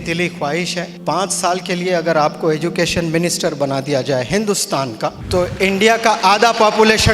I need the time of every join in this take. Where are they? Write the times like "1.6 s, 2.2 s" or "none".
0.9 s, 5.2 s